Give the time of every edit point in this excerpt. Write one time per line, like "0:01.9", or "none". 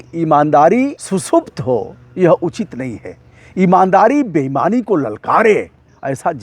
0:01.0